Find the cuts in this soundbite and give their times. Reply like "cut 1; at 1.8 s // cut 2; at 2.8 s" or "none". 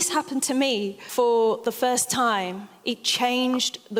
cut 1; at 1.0 s